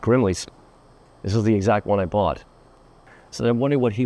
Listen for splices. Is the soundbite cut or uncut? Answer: cut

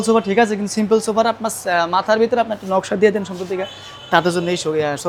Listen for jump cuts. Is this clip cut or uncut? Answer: uncut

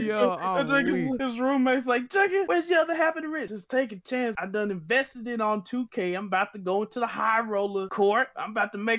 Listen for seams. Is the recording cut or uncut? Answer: cut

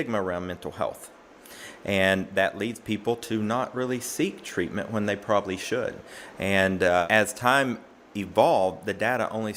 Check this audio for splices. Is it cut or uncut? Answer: uncut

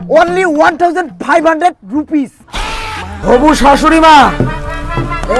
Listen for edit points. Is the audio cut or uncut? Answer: cut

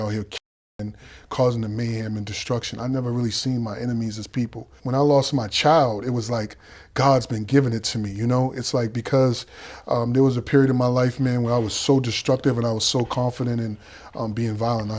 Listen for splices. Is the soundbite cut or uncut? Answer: cut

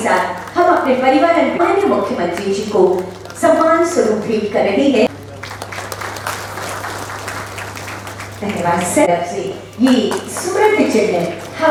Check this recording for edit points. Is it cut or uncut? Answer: uncut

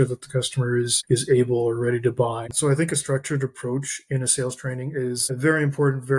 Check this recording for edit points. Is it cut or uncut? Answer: cut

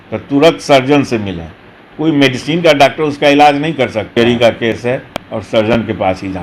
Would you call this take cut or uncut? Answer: cut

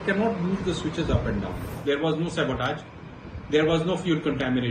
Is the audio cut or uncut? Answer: cut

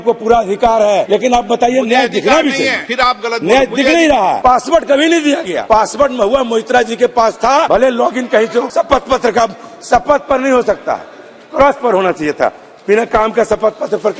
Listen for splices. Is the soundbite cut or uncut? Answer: cut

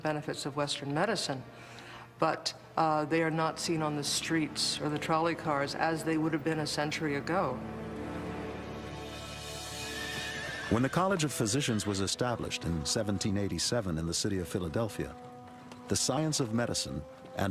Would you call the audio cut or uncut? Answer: cut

